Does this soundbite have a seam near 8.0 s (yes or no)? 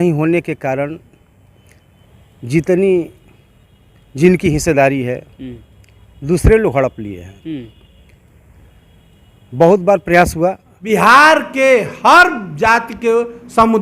no